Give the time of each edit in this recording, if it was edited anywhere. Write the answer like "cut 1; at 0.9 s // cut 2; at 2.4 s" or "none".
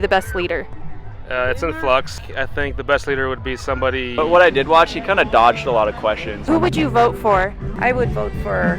cut 1; at 2.2 s // cut 2; at 4.1 s // cut 3; at 6.4 s // cut 4; at 7.7 s